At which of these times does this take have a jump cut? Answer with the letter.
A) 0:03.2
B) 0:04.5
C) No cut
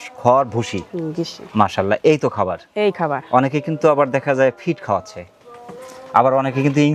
C